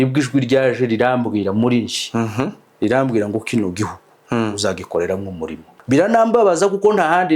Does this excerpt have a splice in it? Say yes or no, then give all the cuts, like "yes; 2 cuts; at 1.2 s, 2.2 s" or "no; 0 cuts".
yes; 1 cut; at 5.7 s